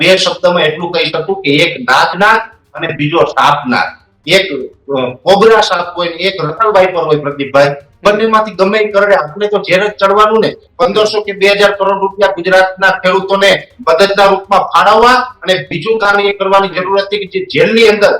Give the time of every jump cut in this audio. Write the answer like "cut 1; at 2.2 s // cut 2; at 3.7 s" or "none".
cut 1; at 10.6 s